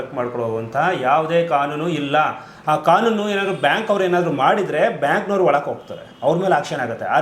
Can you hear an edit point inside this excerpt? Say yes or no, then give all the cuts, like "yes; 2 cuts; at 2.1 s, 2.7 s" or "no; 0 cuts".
no; 0 cuts